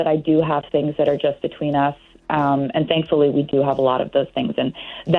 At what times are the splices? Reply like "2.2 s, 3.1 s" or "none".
none